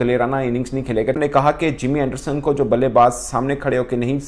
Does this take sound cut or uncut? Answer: cut